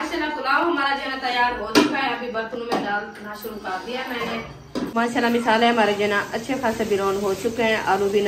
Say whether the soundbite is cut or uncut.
cut